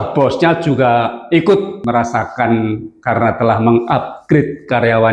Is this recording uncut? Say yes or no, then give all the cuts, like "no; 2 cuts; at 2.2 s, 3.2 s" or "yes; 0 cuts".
no; 1 cut; at 1.8 s